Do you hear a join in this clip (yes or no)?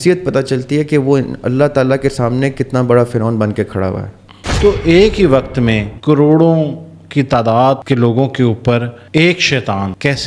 yes